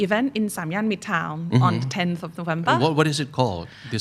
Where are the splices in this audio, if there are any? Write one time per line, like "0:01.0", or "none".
none